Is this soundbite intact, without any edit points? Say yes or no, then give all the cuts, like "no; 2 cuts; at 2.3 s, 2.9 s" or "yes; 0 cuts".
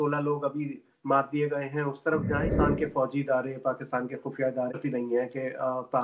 no; 2 cuts; at 2.5 s, 4.8 s